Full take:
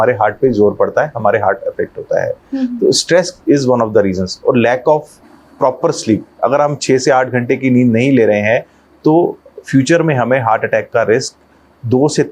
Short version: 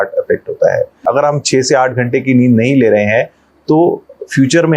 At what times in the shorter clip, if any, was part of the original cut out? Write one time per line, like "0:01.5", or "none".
0:00.9